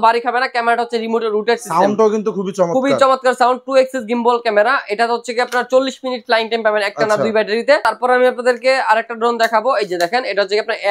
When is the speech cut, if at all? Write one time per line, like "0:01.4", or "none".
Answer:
0:07.8